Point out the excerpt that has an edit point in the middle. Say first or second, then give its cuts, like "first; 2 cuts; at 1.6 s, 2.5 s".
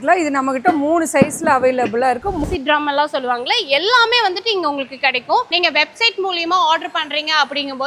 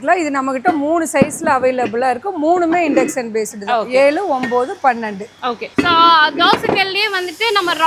first; 2 cuts; at 2.4 s, 5.5 s